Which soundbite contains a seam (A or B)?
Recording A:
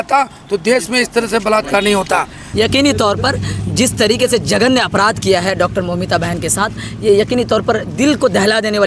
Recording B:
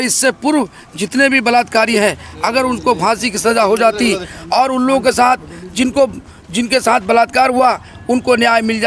A